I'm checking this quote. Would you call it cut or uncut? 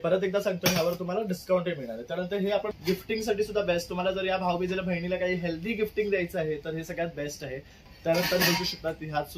cut